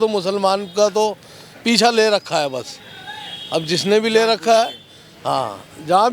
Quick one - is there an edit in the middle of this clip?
no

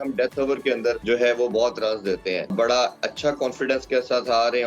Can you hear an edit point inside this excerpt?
yes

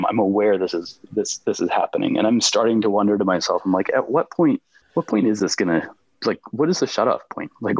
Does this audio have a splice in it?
yes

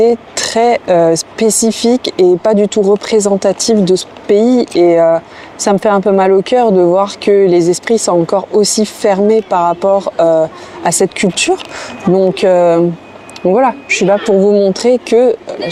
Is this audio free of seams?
yes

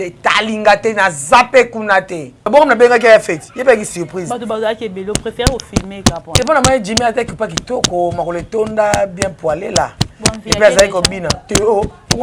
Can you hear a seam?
yes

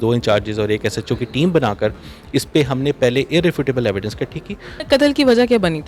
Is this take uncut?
no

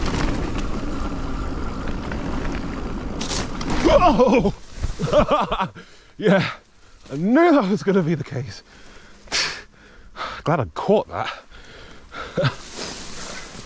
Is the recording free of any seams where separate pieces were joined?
yes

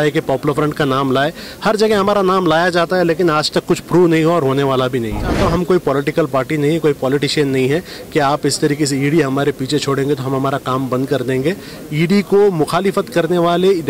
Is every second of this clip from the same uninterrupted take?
no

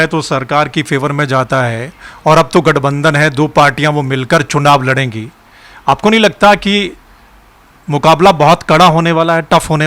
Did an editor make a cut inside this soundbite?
no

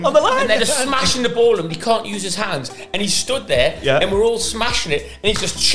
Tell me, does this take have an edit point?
no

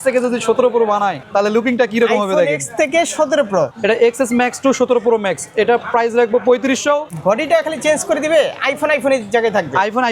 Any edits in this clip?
yes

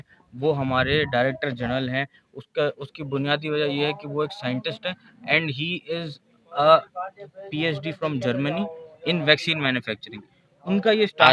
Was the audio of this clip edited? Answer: no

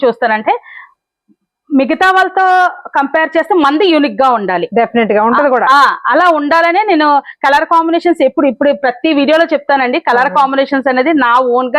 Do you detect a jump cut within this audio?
no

